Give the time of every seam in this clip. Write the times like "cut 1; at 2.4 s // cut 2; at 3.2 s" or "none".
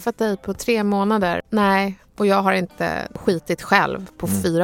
cut 1; at 1.4 s // cut 2; at 3.2 s